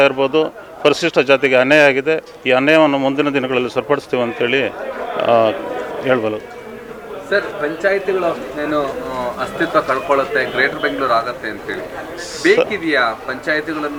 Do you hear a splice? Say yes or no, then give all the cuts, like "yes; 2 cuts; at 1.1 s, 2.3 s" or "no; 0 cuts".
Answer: no; 0 cuts